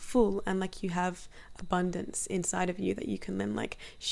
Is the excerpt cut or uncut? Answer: uncut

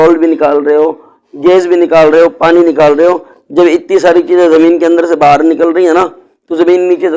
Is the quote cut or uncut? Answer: uncut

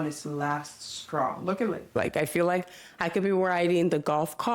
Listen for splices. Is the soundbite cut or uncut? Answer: cut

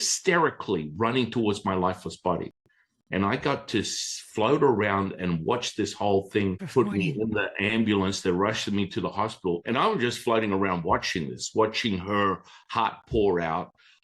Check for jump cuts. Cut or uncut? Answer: cut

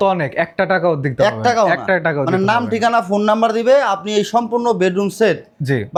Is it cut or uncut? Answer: uncut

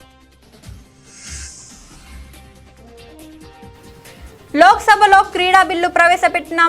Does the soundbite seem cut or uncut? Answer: uncut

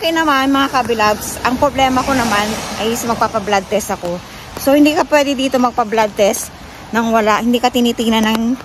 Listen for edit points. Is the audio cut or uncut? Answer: uncut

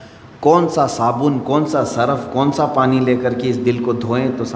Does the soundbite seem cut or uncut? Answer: uncut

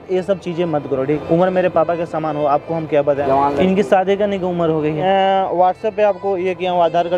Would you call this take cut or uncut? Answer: cut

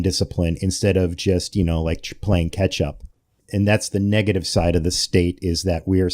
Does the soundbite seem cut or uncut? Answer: cut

